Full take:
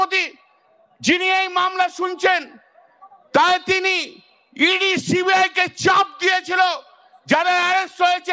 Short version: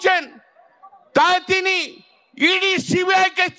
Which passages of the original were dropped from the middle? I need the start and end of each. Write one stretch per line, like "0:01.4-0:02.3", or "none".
none